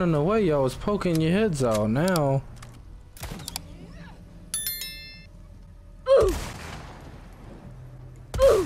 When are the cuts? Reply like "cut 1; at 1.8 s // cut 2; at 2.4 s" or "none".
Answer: none